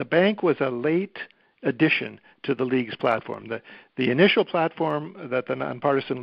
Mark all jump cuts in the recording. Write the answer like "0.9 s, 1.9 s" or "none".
none